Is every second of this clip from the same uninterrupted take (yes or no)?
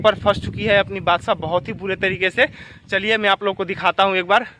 yes